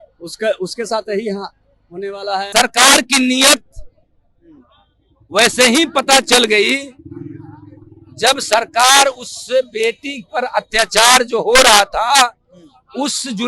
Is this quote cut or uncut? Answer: cut